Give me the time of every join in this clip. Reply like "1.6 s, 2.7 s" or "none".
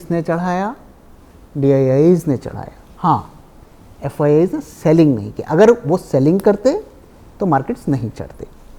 none